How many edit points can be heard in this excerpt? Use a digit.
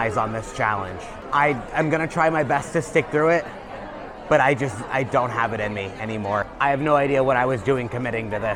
2